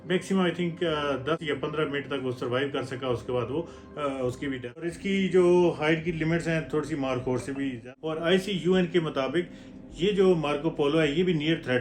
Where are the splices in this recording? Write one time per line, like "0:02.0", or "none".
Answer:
0:01.4
0:04.8
0:07.8